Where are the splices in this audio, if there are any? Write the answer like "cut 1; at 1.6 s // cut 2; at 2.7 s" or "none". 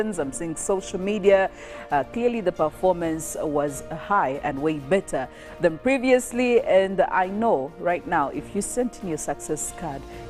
none